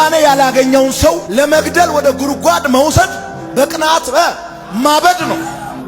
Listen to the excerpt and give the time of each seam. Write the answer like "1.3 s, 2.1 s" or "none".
none